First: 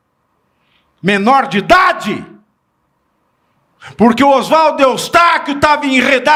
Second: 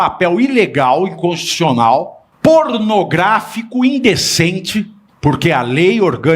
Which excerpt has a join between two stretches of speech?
second; 2 cuts; at 2.2 s, 5.0 s

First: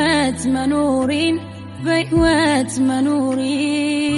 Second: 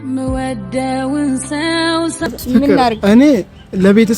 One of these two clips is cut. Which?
second; 1 cut; at 2.4 s

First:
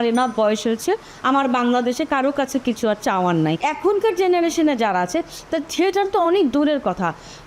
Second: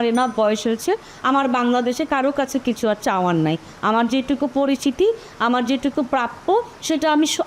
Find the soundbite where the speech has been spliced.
first; 1 cut; at 3.6 s

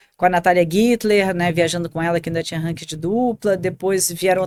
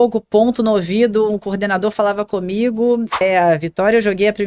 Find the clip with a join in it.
second; 1 cut; at 3.2 s

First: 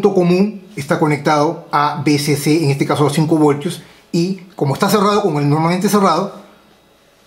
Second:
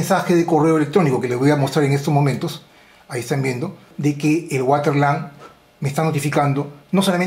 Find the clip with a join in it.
second; 1 cut; at 3.9 s

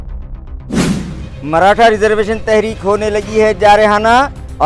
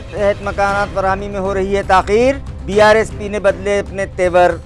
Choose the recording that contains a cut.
first; 1 cut; at 1.2 s

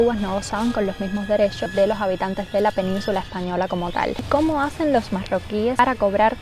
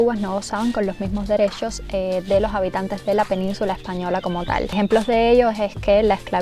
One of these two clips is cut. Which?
first; 2 cuts; at 1.7 s, 4.2 s

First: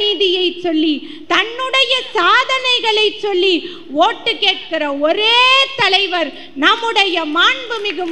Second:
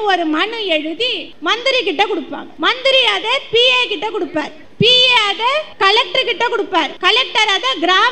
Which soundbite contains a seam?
second; 5 cuts; at 1.3 s, 2.4 s, 4.6 s, 5.7 s, 6.9 s

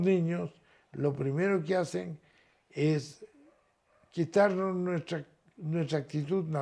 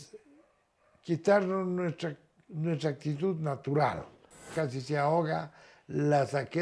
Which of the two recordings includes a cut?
second; 1 cut; at 4.5 s

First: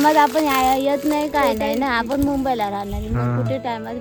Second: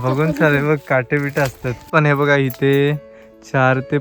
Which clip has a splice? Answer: second; 1 cut; at 1.9 s

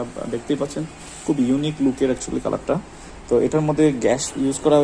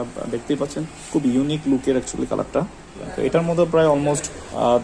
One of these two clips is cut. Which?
second; 2 cuts; at 0.9 s, 3.0 s

